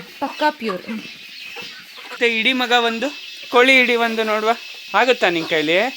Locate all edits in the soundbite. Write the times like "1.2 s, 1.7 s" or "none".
2.1 s, 4.7 s